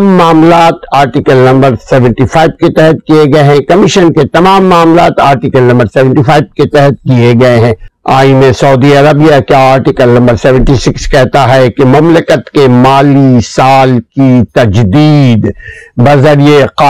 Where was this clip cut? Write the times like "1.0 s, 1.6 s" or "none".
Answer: 7.9 s